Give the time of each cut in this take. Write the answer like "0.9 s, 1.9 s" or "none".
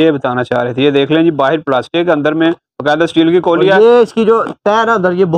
none